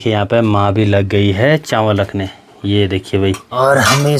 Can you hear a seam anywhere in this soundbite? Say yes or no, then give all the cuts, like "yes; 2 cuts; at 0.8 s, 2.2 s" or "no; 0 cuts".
no; 0 cuts